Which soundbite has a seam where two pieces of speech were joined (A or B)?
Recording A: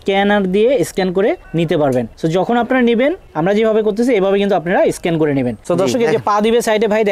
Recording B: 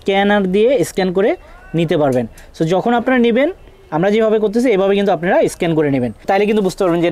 A